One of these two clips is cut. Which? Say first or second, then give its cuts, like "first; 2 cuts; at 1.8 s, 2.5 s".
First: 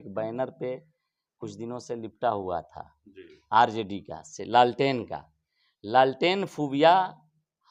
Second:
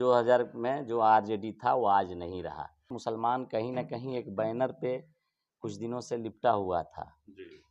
second; 1 cut; at 2.9 s